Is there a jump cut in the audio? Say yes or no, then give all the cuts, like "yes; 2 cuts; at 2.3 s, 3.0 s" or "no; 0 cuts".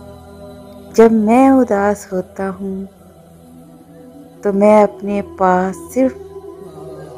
yes; 3 cuts; at 1.0 s, 2.9 s, 4.4 s